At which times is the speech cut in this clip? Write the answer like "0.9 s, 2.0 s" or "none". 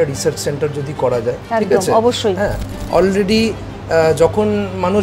2.8 s